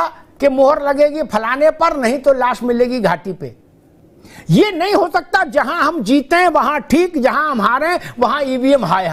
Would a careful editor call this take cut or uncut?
cut